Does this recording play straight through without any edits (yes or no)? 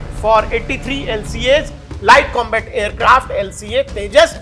yes